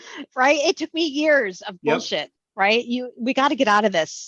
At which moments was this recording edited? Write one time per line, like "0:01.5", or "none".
none